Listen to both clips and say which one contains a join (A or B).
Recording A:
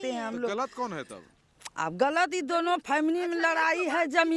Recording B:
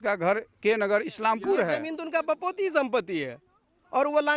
B